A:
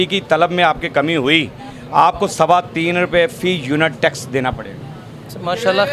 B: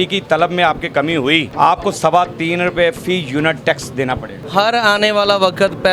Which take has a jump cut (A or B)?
B